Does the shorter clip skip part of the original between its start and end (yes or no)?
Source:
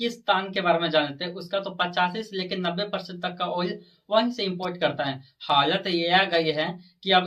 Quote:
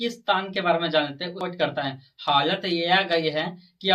yes